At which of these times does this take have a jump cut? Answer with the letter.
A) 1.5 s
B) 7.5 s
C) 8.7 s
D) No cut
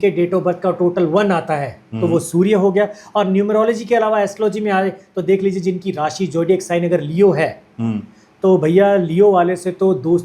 D